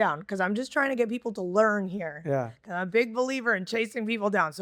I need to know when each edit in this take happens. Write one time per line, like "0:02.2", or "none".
none